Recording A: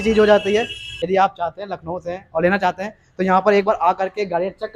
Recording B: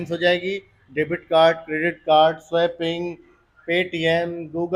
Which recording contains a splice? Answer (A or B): A